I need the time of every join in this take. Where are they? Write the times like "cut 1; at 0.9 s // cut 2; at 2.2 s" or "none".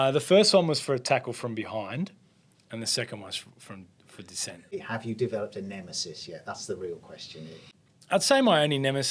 cut 1; at 4.7 s // cut 2; at 7.8 s